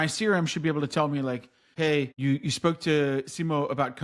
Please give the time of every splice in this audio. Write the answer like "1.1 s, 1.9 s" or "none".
1.8 s

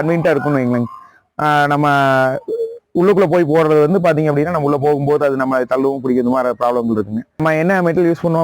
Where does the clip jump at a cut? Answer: 7.4 s

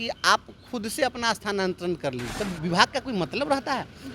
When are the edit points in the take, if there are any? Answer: 2.3 s

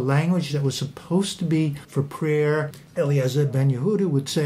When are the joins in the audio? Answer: 1.8 s, 2.8 s

